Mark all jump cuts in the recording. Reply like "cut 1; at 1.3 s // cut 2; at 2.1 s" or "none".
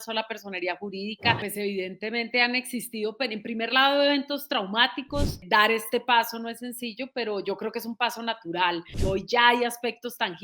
cut 1; at 1.4 s // cut 2; at 5.4 s // cut 3; at 9.0 s